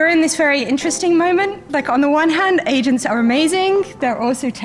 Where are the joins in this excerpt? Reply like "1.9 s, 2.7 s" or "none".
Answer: none